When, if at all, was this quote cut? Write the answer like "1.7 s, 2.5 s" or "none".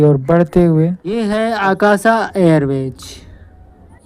1.1 s